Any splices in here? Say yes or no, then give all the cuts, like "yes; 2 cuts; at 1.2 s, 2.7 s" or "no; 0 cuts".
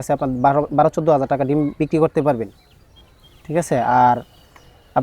no; 0 cuts